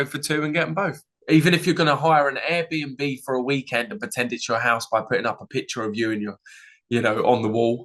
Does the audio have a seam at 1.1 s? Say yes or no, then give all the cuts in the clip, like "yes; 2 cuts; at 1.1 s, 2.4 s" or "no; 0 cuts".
yes; 1 cut; at 1.1 s